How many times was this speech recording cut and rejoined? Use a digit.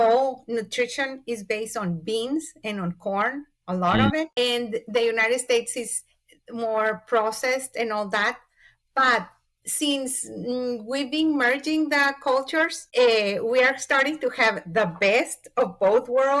2